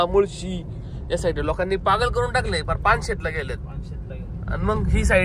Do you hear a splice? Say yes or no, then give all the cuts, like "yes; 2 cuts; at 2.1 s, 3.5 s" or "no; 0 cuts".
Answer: no; 0 cuts